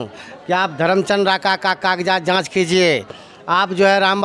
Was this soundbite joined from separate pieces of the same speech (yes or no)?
no